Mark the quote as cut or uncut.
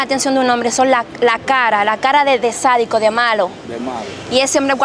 uncut